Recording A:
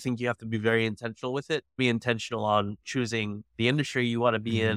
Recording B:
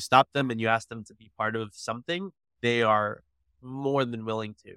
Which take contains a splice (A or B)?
A